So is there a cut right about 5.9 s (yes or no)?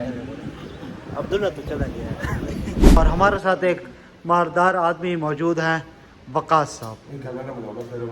no